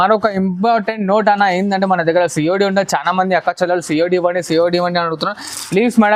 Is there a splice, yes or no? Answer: no